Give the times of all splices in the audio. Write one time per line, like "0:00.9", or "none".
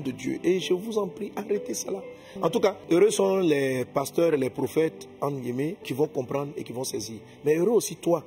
0:02.8
0:05.8